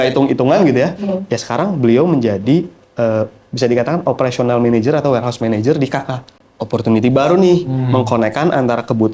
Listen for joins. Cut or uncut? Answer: cut